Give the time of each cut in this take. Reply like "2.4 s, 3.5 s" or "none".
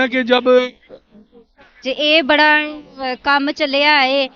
1.7 s